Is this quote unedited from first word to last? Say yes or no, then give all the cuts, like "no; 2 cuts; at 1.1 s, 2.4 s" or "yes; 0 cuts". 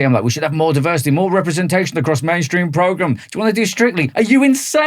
yes; 0 cuts